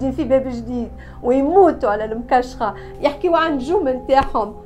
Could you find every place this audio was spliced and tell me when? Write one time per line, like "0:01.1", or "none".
0:02.8